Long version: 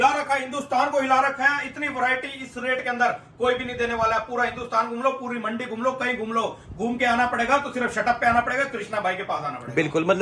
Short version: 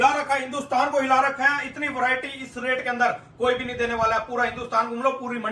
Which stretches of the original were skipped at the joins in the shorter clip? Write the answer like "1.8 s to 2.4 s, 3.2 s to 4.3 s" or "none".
none